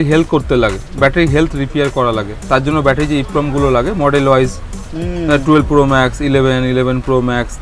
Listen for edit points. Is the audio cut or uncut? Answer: uncut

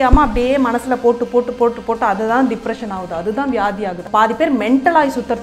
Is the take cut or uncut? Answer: cut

